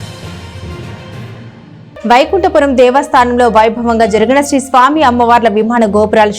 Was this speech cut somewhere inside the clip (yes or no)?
yes